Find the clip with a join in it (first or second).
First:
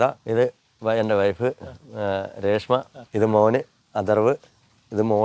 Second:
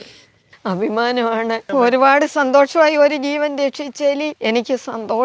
second